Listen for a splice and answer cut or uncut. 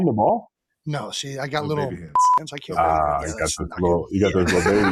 uncut